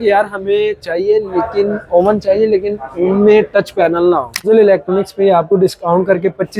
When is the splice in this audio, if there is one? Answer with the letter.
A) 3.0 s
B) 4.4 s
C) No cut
B